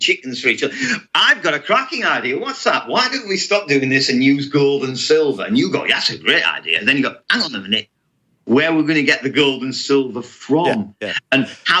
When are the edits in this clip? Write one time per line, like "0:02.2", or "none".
none